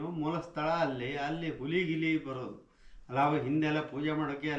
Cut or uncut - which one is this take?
uncut